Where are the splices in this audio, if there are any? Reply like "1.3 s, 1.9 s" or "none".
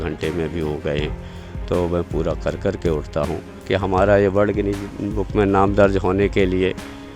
3.6 s

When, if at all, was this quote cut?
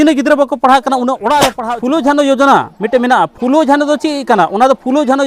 1.6 s

